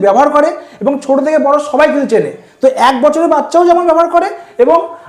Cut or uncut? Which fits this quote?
uncut